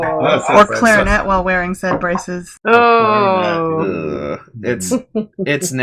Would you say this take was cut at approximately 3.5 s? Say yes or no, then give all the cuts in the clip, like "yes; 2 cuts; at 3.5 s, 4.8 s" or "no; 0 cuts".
yes; 1 cut; at 3.5 s